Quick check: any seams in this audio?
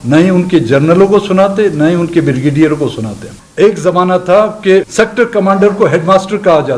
yes; 2 cuts; at 3.4 s, 4.9 s

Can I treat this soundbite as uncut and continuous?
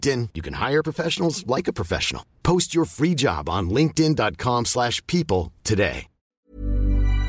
no; 1 cut; at 6.3 s

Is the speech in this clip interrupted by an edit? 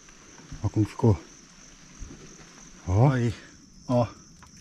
yes; 1 cut; at 3.5 s

